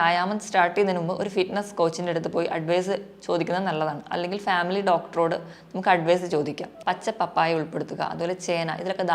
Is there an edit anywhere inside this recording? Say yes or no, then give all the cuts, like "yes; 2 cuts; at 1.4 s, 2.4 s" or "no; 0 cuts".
yes; 1 cut; at 6.7 s